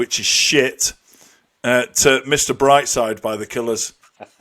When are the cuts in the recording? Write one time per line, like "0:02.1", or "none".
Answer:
none